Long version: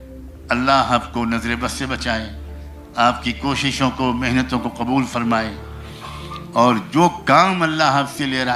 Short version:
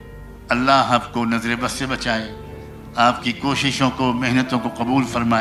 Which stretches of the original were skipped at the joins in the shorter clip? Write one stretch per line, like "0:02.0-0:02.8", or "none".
none